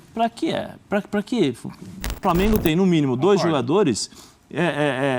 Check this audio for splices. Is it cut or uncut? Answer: cut